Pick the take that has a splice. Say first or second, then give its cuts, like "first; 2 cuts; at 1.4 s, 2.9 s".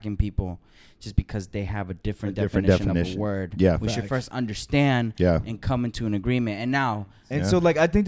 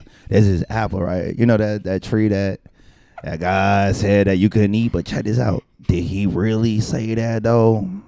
first; 1 cut; at 7.1 s